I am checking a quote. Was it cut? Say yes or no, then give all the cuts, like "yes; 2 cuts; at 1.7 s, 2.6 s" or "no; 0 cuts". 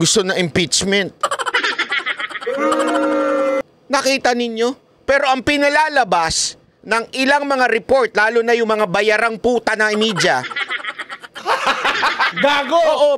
yes; 1 cut; at 3.6 s